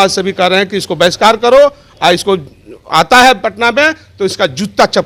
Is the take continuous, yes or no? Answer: yes